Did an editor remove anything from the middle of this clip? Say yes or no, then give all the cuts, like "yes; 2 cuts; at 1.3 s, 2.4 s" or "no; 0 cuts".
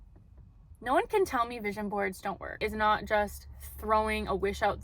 yes; 1 cut; at 2.6 s